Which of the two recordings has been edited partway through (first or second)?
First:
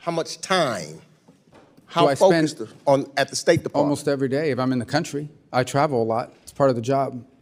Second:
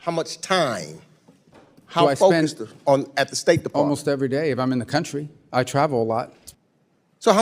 second